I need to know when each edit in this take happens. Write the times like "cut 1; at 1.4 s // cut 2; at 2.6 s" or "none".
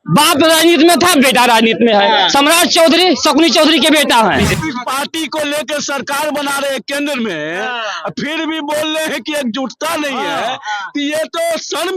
cut 1; at 4.5 s